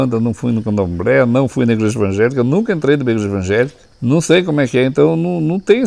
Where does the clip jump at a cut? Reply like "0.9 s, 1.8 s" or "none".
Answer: 3.9 s